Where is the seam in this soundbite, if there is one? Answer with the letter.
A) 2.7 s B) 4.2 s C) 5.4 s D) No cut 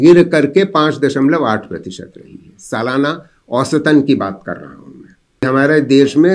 C